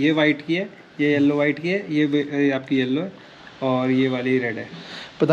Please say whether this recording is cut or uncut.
uncut